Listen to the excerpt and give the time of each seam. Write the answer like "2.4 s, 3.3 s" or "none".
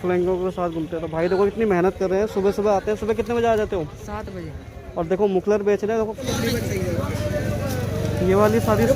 6.2 s